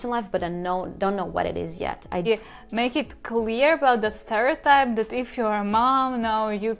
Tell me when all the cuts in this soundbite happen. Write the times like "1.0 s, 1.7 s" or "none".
2.3 s

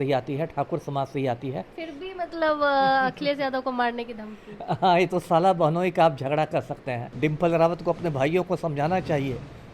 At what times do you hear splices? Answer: 1.7 s, 7.0 s

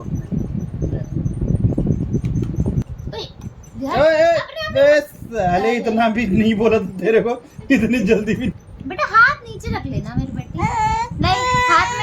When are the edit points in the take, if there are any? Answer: 2.9 s, 8.5 s

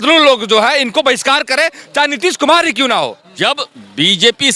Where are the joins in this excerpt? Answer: 3.2 s

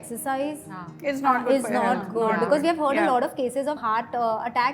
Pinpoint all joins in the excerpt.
none

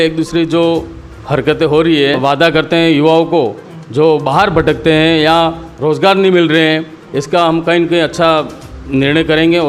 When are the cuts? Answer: 2.2 s

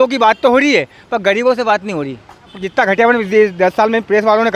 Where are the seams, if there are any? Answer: 2.6 s

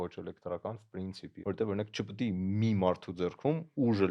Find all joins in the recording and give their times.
1.3 s

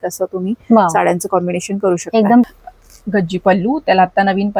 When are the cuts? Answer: 2.5 s

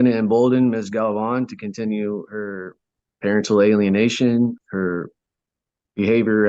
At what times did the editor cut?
4.6 s

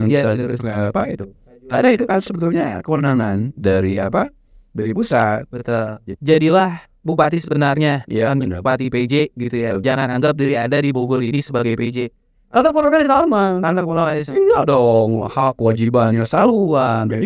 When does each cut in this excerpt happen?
6.0 s

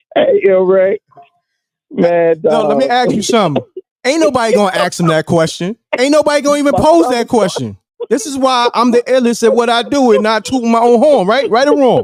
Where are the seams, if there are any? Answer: none

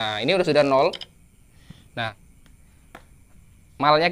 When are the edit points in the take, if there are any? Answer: 2.2 s

